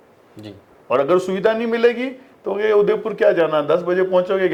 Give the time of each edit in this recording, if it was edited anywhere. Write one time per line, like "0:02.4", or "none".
none